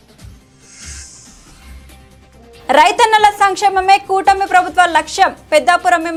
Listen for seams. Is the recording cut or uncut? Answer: uncut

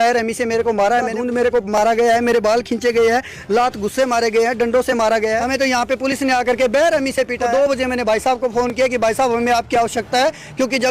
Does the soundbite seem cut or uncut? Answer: cut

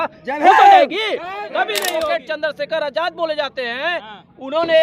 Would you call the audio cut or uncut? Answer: cut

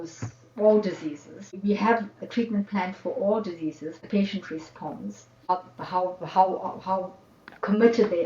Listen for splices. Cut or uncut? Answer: cut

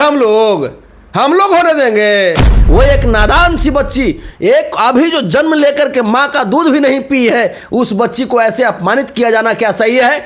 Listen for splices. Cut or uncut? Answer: cut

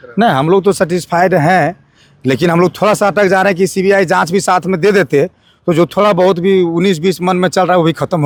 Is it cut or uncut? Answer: uncut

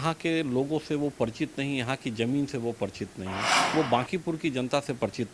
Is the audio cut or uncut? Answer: cut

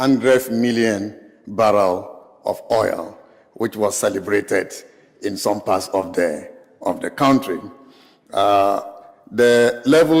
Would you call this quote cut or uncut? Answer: cut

